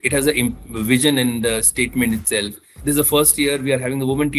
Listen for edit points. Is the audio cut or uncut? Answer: cut